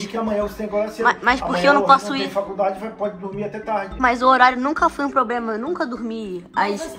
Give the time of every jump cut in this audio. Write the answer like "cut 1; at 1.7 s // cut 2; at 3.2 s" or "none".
cut 1; at 4.0 s